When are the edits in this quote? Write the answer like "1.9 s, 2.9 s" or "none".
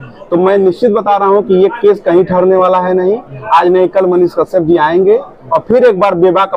none